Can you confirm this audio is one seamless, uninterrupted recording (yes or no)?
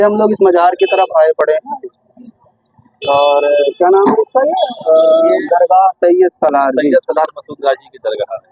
yes